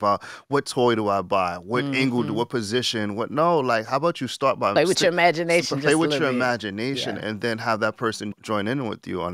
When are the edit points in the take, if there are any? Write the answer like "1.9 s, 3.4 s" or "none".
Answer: 8.3 s